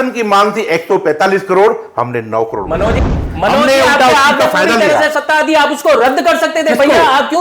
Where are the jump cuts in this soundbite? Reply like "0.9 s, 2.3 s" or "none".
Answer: 3.0 s